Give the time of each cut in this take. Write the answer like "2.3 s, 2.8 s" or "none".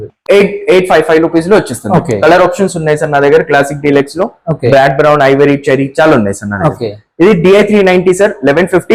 none